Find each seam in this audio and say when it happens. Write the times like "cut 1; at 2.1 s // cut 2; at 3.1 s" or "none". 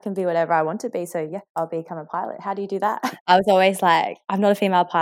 cut 1; at 1.4 s // cut 2; at 3.0 s